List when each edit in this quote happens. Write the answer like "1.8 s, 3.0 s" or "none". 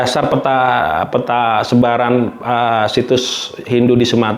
none